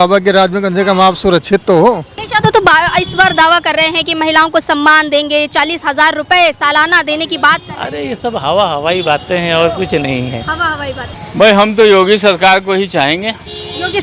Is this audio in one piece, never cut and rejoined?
no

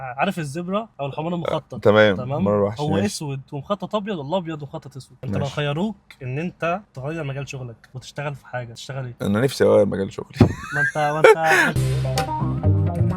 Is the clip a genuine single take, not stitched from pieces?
no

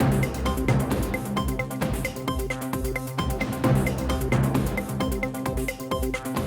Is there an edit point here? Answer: no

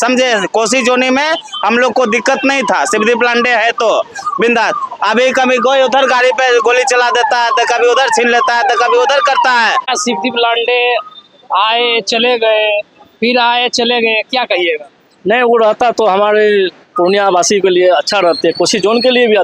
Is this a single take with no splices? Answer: no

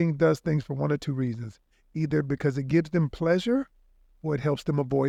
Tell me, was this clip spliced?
no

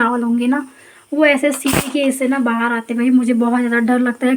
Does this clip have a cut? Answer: no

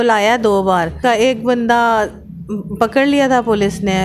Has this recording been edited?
yes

